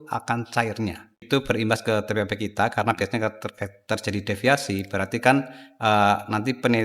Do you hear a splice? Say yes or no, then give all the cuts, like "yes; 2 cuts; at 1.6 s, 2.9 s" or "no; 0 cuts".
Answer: yes; 1 cut; at 1.2 s